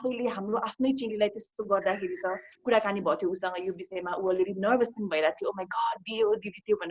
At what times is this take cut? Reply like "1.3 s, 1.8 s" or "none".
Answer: 2.5 s